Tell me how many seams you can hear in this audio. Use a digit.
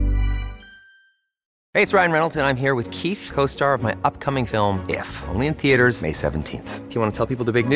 1